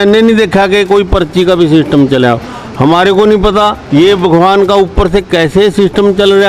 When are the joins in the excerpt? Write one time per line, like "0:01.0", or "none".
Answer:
0:03.8